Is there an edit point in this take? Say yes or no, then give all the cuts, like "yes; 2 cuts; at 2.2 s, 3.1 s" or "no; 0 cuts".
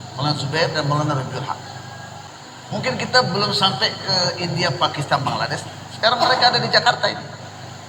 yes; 1 cut; at 2.2 s